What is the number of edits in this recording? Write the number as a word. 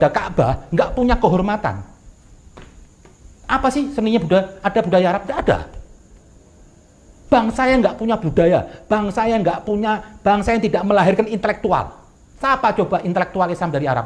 zero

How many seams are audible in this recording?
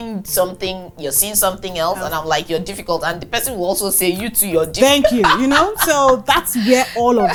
zero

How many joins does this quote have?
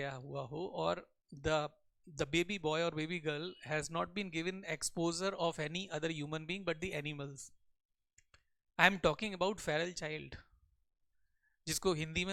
zero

